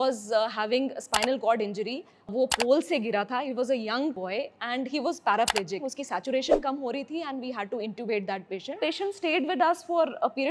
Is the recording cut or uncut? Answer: cut